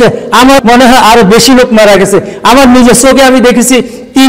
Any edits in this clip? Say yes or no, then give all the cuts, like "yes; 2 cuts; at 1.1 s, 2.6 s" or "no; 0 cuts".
no; 0 cuts